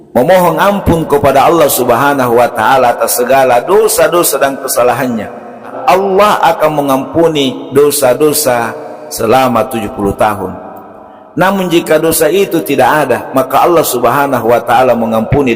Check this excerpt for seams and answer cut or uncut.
cut